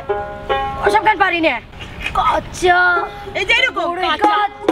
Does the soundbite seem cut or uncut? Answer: cut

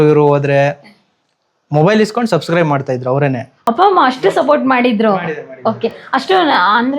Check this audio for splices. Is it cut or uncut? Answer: uncut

